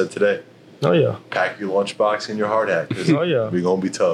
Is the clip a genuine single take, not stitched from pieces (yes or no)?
yes